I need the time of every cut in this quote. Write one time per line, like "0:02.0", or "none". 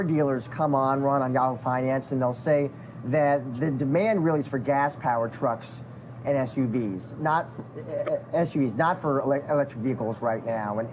none